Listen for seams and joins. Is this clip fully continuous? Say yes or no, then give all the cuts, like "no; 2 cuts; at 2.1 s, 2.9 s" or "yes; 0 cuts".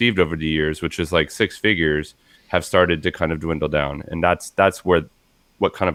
yes; 0 cuts